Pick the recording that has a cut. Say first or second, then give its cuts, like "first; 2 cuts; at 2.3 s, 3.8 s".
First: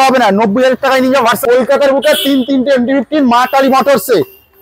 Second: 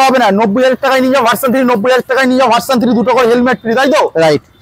first; 1 cut; at 1.4 s